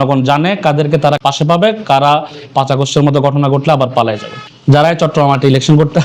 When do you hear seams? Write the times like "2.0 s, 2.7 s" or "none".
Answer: 1.2 s, 4.5 s